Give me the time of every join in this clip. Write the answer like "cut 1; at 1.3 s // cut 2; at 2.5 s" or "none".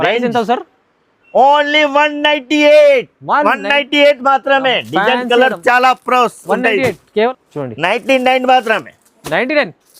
cut 1; at 7.3 s

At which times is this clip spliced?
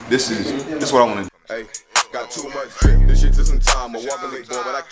cut 1; at 1.3 s

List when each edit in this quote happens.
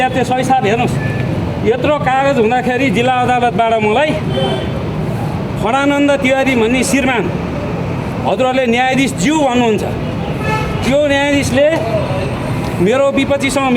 none

